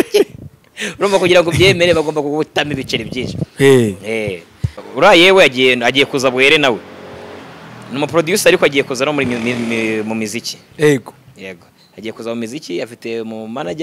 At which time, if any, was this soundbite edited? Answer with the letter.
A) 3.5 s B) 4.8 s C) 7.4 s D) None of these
B